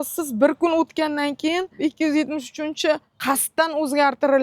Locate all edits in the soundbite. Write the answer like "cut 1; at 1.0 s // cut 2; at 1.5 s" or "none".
cut 1; at 1.7 s // cut 2; at 3.1 s